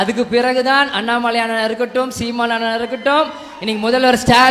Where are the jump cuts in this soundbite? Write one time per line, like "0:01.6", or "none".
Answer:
none